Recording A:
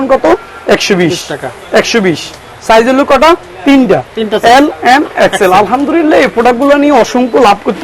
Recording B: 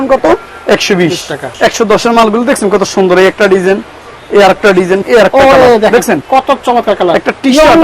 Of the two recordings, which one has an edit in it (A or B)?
B